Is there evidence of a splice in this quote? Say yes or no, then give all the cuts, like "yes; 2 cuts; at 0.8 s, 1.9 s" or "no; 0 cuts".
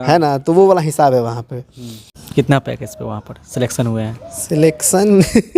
yes; 1 cut; at 2.3 s